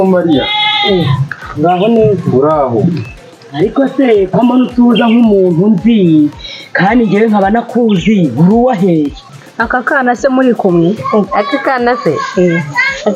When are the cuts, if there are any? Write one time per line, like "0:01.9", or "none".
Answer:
0:09.4